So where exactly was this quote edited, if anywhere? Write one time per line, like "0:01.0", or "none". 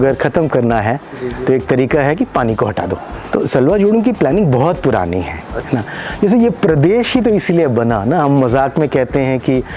0:03.1